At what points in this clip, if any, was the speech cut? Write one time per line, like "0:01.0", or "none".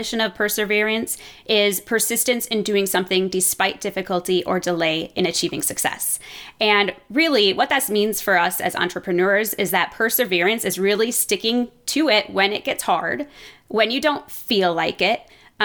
none